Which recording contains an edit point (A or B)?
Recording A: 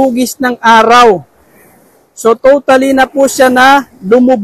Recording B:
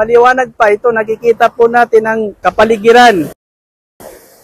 B